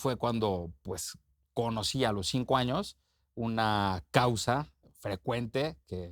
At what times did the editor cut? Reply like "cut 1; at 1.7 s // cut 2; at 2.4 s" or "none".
cut 1; at 4.8 s